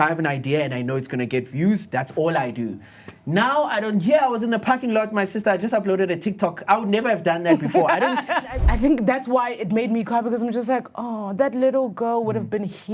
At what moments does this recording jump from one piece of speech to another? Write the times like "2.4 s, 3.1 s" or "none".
8.6 s